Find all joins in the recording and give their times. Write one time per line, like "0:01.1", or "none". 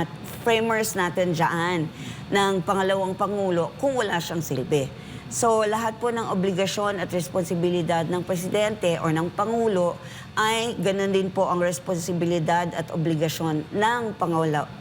none